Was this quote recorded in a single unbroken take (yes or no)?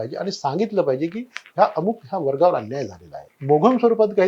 no